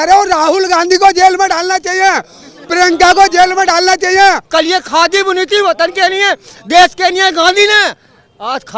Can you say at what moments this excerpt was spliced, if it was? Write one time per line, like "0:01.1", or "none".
0:04.4